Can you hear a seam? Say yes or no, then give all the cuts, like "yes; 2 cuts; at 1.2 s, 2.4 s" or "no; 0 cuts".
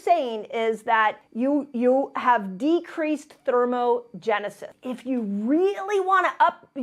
yes; 1 cut; at 4.7 s